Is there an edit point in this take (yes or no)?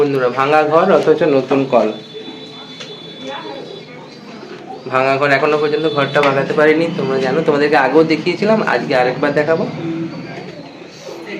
no